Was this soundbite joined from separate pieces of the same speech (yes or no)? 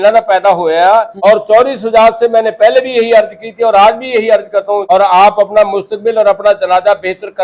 yes